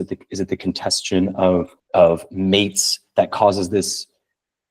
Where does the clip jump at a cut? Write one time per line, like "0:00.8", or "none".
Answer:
0:01.8